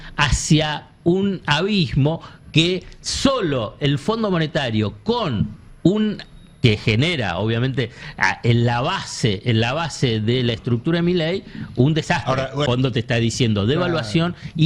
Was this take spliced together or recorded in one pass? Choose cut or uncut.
cut